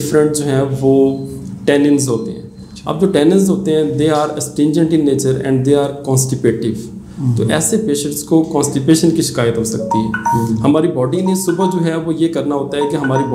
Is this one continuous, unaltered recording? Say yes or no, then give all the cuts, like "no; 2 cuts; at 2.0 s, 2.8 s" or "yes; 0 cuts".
yes; 0 cuts